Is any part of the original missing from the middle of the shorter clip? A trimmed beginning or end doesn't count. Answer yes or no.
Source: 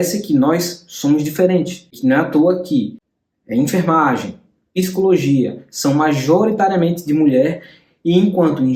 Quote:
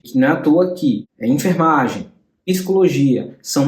yes